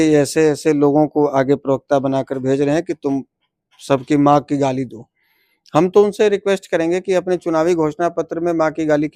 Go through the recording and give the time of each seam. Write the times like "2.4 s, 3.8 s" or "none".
none